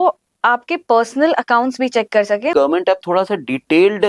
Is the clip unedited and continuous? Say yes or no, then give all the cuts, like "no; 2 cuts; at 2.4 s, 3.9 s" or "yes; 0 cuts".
no; 1 cut; at 2.5 s